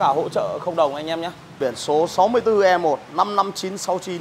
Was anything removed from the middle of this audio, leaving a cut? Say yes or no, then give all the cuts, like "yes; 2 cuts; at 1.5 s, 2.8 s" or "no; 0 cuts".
yes; 1 cut; at 1.4 s